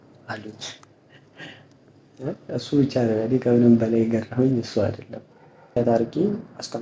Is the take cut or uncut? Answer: cut